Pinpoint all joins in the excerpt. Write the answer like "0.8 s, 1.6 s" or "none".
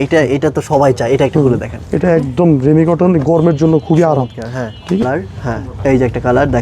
5.0 s